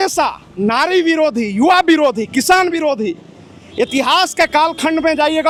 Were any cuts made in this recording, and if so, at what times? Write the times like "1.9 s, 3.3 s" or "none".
none